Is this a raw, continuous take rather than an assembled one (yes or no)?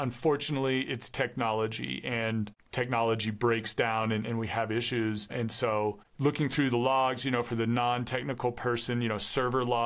no